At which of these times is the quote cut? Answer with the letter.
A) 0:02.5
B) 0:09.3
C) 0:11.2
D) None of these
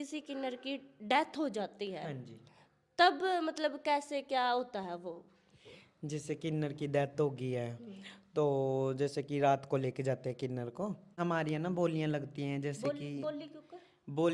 C